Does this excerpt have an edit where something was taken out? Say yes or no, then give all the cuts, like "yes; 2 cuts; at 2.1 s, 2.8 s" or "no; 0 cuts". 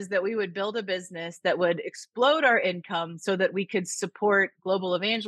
no; 0 cuts